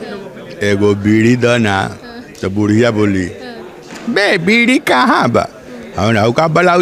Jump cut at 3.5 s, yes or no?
no